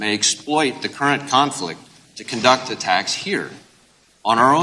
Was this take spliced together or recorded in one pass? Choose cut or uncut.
uncut